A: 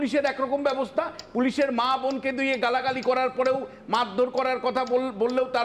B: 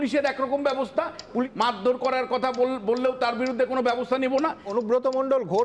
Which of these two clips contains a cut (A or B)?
B